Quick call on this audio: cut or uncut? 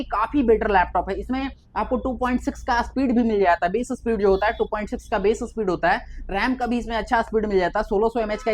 uncut